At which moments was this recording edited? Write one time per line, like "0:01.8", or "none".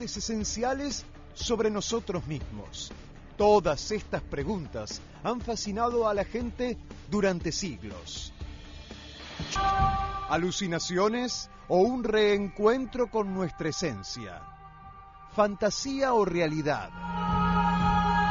0:09.6